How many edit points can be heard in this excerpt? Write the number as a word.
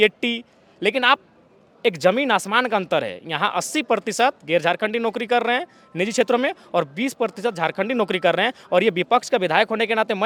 zero